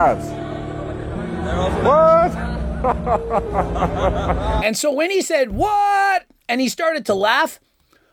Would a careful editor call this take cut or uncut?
uncut